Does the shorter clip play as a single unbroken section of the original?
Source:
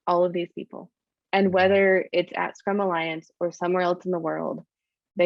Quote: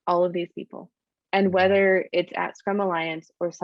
yes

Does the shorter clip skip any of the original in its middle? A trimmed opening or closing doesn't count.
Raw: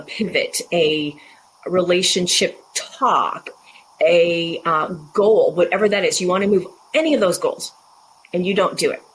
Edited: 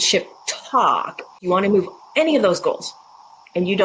yes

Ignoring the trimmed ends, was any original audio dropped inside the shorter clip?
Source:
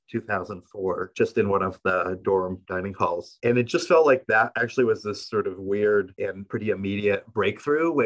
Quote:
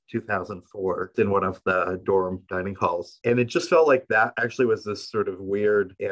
yes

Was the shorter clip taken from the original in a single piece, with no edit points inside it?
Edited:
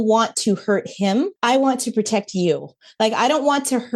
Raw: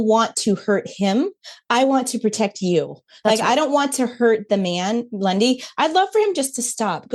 no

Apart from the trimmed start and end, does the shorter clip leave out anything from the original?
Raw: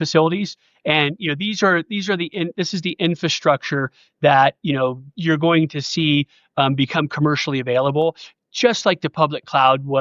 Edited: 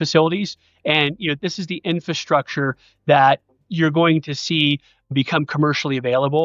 yes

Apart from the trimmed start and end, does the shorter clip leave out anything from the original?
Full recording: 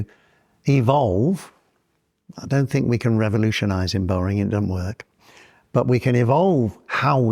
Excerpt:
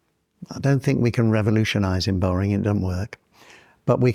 no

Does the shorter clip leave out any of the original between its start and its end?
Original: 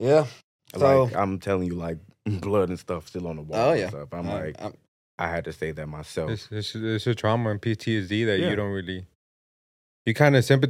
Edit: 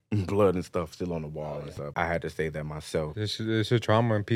yes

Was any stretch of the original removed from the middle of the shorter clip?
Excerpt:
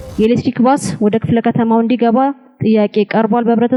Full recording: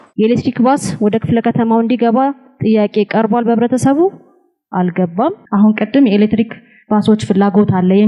no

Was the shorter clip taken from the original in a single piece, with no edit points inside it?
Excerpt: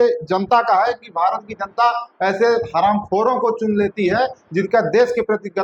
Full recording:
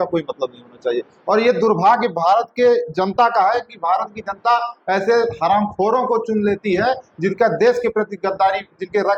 yes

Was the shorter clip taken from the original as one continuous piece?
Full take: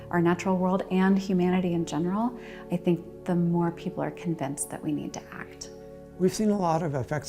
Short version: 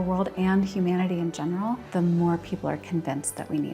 no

